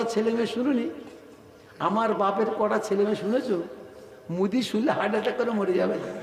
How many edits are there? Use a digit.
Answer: 0